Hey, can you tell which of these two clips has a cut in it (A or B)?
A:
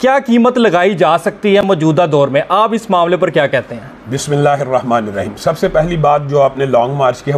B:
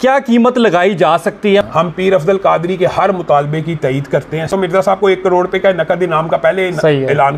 B